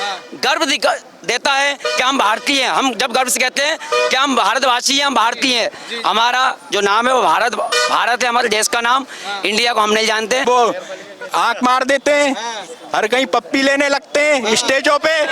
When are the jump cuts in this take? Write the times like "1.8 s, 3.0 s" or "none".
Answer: 10.4 s